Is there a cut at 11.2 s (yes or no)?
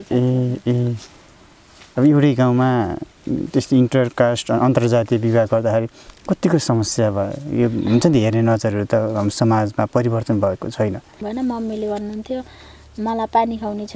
yes